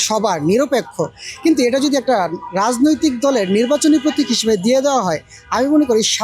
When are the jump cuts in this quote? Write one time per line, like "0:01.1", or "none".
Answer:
none

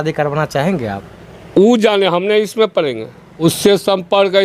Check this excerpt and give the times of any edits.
0:03.2

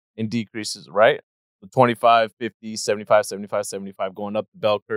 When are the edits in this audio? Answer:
0:01.4

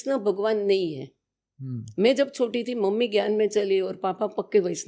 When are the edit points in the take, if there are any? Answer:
none

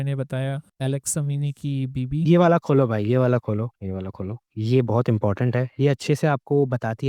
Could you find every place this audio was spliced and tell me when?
none

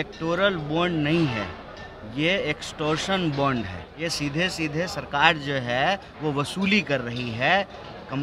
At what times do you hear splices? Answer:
0:03.8

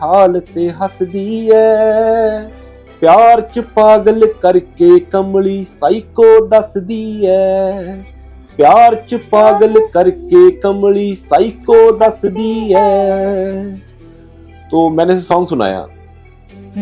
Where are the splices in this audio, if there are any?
none

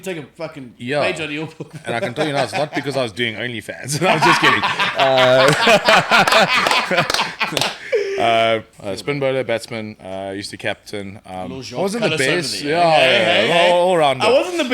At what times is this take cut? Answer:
0:08.7

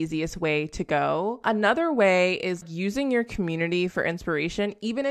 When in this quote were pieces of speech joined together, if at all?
0:01.4
0:02.6

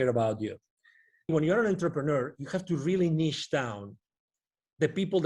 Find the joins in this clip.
0:01.3

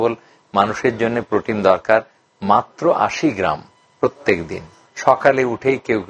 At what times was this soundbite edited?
0:04.7

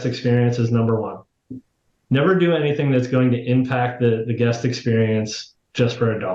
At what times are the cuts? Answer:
0:01.5

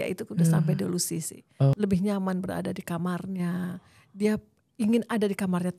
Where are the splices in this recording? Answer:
0:01.8

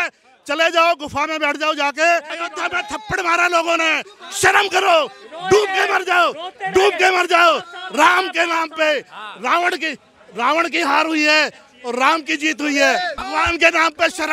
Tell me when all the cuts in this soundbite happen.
0:02.4
0:13.2

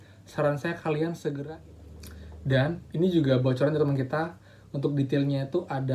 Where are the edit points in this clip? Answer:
0:01.4

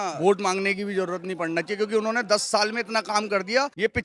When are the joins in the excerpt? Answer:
none

